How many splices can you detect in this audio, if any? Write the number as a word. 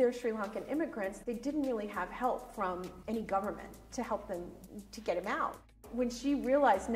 four